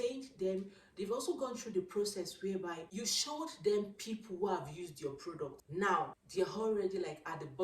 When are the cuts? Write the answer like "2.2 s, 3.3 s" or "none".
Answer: 2.9 s, 5.6 s, 6.2 s